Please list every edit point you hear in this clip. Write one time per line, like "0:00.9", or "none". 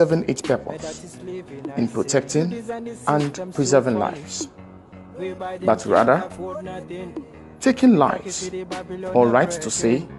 0:06.2
0:07.6